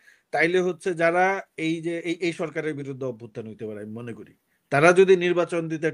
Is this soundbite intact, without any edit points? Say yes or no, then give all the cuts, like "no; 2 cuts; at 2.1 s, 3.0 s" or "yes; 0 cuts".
yes; 0 cuts